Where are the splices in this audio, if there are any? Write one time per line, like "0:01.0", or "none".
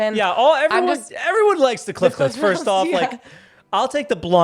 0:01.1